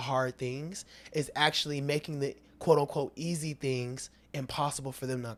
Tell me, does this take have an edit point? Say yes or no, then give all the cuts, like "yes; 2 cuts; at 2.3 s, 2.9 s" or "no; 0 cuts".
no; 0 cuts